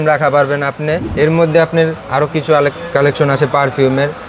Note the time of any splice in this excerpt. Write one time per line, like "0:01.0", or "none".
0:01.1